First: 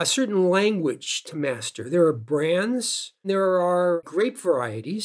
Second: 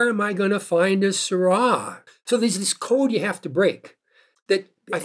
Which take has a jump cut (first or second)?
first